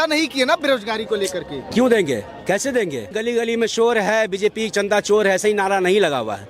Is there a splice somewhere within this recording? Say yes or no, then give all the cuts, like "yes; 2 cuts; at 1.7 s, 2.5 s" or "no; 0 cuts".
yes; 1 cut; at 3.2 s